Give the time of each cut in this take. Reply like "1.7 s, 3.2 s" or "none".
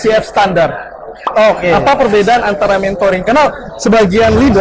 none